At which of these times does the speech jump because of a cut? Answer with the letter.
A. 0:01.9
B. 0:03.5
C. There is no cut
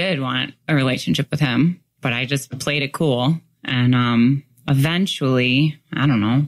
C